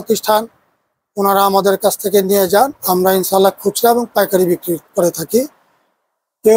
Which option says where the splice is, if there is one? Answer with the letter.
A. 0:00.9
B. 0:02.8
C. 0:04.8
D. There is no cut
B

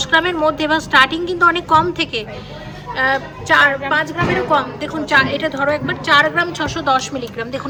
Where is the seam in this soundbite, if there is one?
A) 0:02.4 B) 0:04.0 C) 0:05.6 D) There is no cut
D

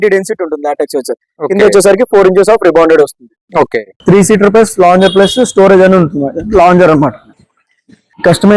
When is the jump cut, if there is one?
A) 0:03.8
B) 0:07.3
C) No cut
A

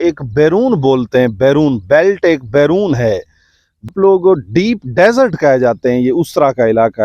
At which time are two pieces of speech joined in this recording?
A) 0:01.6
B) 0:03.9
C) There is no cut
B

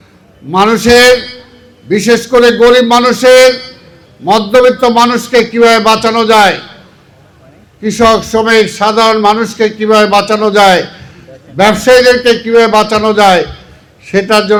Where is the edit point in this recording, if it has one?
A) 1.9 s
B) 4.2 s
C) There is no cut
C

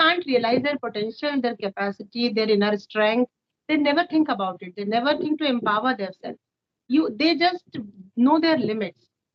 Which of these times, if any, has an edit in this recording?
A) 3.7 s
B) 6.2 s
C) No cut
C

